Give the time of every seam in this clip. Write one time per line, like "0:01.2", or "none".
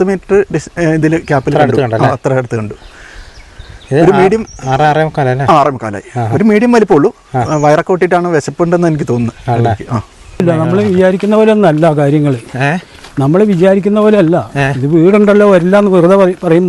0:10.4